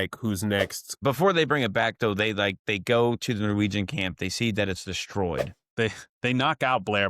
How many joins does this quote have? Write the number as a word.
two